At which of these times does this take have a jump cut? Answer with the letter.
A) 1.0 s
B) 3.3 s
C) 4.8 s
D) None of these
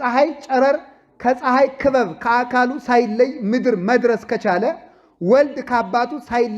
D